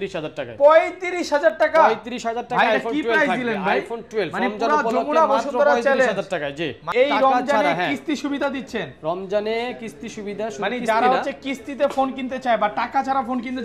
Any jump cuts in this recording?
yes; 1 cut; at 6.8 s

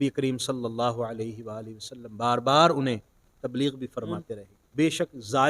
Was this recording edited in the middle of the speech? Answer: yes; 1 cut; at 4.4 s

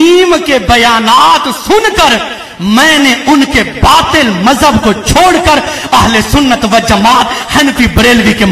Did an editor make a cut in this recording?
no; 0 cuts

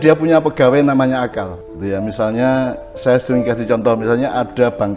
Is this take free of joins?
no; 1 cut; at 1.6 s

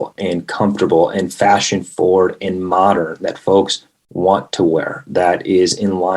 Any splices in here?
no; 0 cuts

